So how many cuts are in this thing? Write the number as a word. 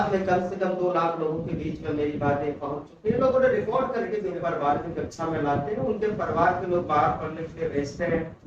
one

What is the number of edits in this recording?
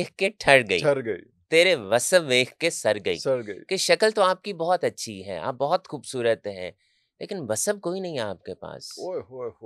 zero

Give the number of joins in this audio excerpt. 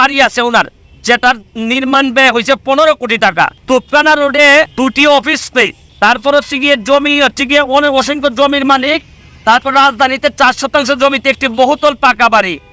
three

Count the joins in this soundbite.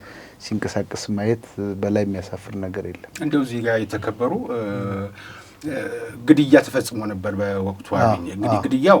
zero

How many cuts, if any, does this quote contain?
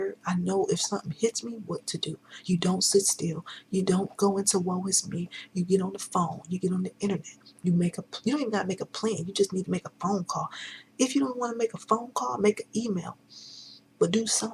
zero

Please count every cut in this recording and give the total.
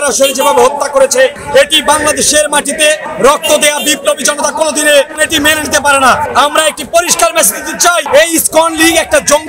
zero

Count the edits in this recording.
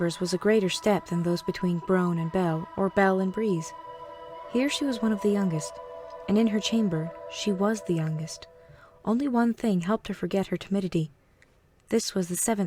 zero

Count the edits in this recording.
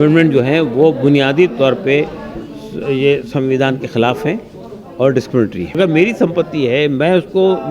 one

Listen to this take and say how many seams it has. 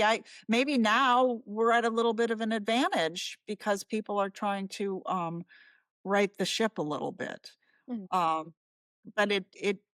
zero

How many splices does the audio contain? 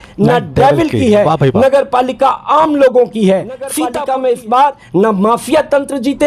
one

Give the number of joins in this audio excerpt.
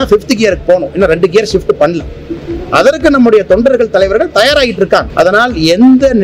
one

